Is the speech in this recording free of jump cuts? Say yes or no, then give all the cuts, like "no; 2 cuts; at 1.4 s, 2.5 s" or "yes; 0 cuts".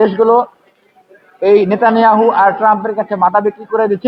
yes; 0 cuts